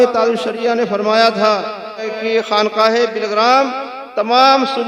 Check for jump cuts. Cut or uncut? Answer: cut